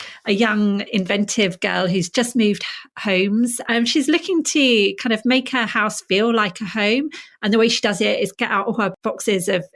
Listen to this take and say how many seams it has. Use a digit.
2